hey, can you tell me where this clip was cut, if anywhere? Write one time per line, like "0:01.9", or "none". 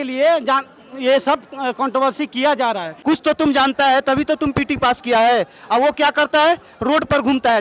0:02.9

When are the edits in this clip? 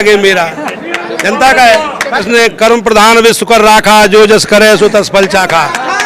0:02.3

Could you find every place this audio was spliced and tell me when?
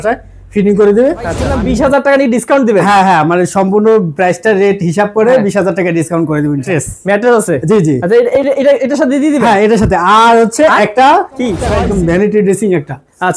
0:01.4
0:06.7
0:11.7

